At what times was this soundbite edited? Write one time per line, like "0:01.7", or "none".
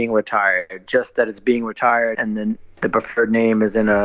0:02.2